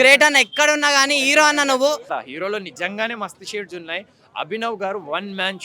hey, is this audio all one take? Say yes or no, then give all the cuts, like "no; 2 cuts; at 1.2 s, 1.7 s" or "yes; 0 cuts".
no; 1 cut; at 2.1 s